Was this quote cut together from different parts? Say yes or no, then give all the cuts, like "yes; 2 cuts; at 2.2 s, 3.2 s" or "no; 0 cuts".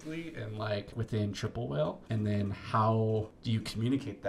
yes; 3 cuts; at 0.9 s, 2.0 s, 3.4 s